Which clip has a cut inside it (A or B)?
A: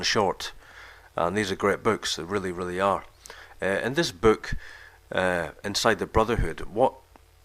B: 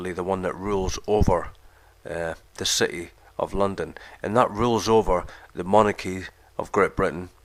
A